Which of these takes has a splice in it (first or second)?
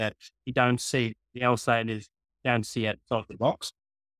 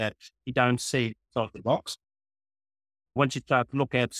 second